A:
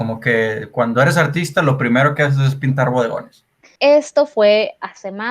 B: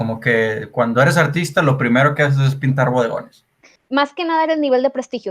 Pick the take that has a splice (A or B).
A